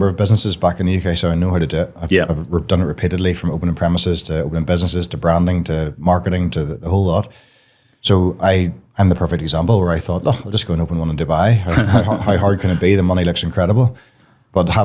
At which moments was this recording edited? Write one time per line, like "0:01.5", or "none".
none